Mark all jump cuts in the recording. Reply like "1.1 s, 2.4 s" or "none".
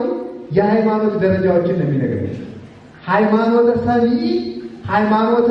none